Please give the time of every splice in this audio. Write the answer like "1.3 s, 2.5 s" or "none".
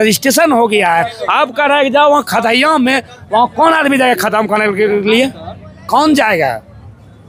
none